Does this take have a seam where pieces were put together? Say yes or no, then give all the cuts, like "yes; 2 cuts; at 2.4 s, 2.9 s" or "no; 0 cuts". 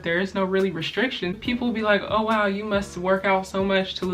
yes; 1 cut; at 1.4 s